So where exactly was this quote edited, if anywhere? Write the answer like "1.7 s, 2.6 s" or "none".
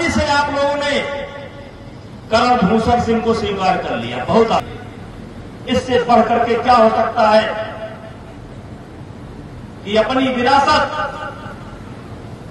4.6 s